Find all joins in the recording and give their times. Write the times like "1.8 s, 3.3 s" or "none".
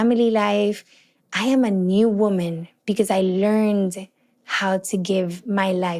none